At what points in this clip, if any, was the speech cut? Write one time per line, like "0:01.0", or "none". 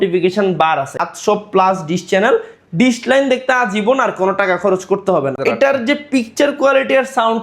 0:01.0
0:05.4